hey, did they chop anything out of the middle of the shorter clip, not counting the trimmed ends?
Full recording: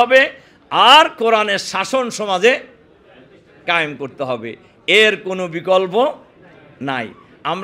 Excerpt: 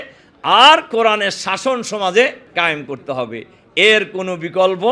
yes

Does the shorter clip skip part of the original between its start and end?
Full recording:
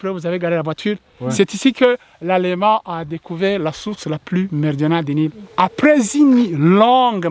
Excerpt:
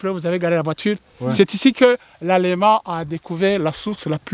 no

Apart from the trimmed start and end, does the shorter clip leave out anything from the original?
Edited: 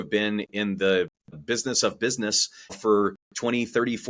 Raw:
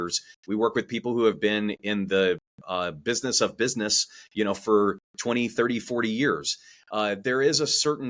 yes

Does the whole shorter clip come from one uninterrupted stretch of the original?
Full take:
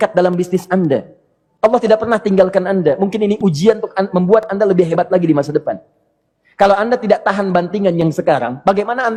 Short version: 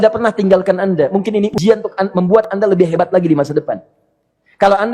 no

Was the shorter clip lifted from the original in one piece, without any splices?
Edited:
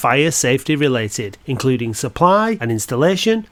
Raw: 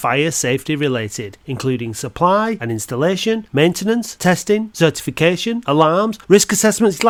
yes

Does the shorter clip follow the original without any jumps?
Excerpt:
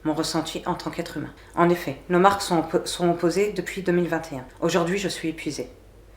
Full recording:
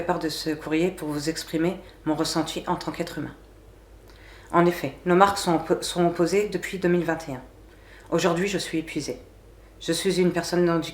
no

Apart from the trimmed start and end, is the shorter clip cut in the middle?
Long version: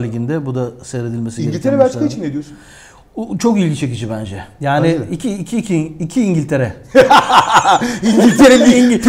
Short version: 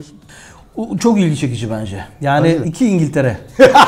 yes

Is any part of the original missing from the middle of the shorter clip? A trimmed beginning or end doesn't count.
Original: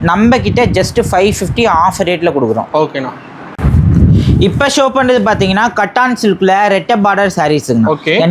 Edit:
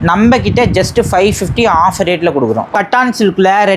yes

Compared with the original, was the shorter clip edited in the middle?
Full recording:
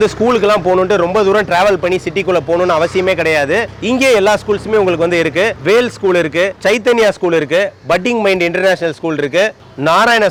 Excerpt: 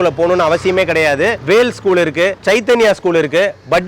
yes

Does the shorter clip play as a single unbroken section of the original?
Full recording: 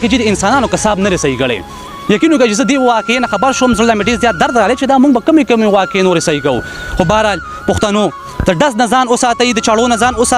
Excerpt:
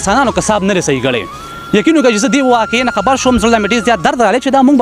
yes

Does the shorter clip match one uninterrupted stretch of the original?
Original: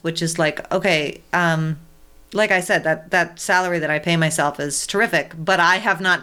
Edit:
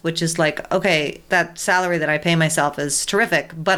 no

